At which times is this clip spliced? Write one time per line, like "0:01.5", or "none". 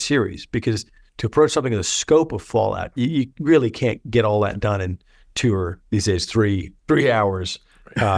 0:05.8
0:06.7